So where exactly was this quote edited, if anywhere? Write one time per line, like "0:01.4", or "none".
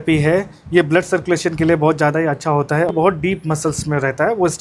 0:02.9